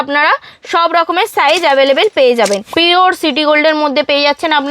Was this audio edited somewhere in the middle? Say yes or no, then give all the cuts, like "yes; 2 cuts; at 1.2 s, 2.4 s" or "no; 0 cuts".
yes; 1 cut; at 2.7 s